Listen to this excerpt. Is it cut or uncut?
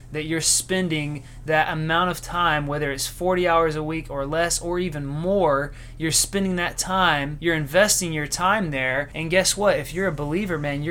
cut